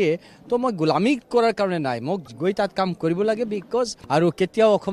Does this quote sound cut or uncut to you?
cut